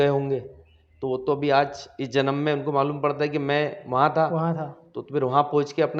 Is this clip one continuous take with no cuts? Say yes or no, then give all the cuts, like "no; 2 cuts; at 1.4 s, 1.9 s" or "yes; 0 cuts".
yes; 0 cuts